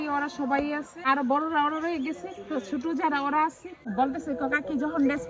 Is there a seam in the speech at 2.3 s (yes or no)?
no